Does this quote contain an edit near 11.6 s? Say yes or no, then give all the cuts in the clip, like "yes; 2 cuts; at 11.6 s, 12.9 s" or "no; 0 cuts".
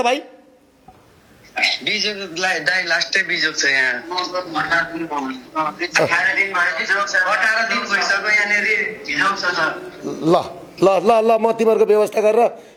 no; 0 cuts